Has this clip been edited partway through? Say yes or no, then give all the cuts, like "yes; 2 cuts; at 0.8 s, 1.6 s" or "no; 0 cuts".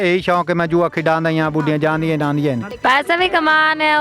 yes; 1 cut; at 2.7 s